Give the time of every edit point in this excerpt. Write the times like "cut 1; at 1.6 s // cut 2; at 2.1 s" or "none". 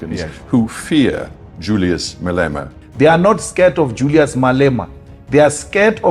cut 1; at 2.8 s